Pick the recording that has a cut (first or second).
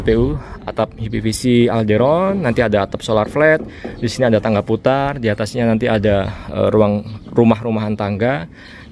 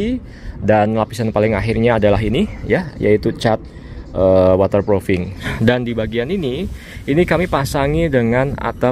second